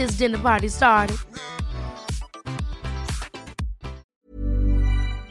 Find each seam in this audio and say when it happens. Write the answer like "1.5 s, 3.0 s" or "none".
4.0 s